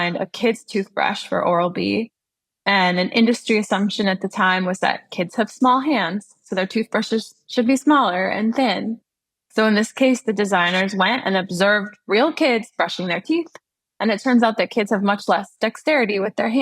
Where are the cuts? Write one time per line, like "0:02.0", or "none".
0:09.5